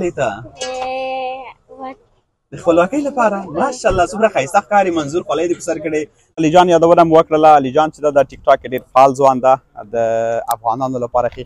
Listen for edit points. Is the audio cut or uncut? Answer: uncut